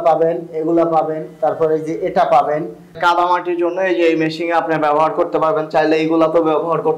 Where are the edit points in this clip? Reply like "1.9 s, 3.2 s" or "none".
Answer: 3.0 s

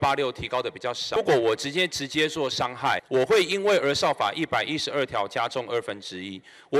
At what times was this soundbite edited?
1.2 s, 3.0 s

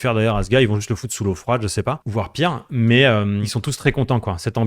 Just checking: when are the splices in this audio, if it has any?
2.0 s, 3.4 s

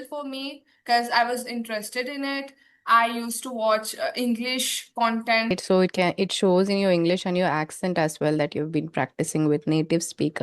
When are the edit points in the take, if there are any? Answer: 5.5 s

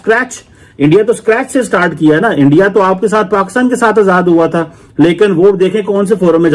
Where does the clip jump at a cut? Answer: none

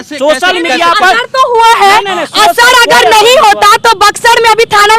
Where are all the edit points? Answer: none

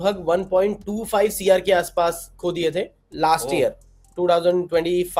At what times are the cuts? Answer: none

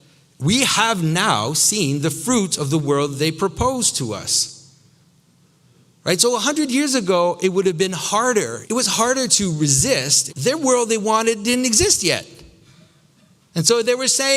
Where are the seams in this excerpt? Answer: 8.6 s, 10.2 s

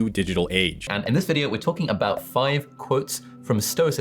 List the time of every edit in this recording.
0.9 s

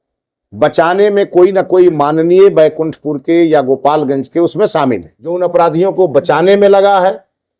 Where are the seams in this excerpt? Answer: 5.4 s

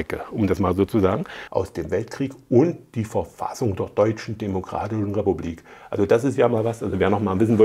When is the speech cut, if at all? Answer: 1.3 s

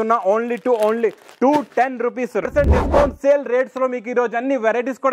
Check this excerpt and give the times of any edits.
2.5 s

